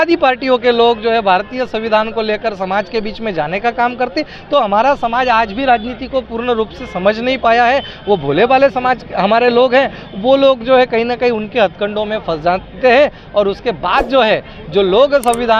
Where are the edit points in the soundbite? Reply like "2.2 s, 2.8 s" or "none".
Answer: none